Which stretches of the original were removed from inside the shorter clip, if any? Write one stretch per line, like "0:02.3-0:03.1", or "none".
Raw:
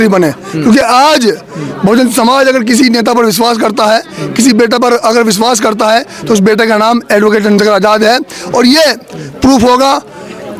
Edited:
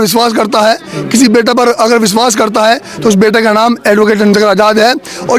none